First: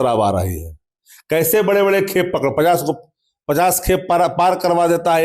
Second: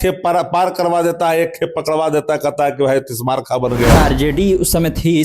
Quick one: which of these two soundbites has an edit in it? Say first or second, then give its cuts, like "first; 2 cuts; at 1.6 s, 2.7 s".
second; 1 cut; at 4.0 s